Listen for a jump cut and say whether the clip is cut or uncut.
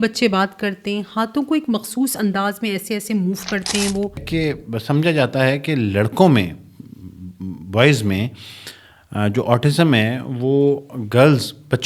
cut